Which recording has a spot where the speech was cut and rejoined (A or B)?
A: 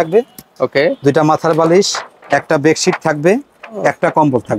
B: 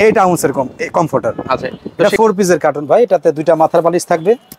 B